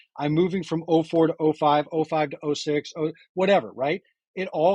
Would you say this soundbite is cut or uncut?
uncut